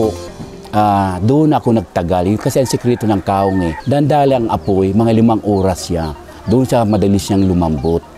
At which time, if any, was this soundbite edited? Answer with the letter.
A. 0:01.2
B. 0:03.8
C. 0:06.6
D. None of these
B